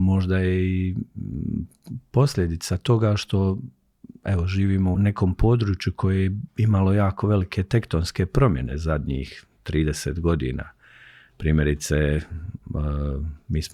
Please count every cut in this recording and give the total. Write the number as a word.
one